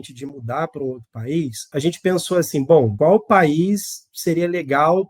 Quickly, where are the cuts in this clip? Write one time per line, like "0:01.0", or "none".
0:01.6
0:02.9